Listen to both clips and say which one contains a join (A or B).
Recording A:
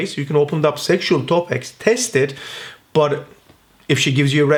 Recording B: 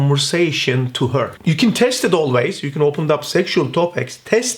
B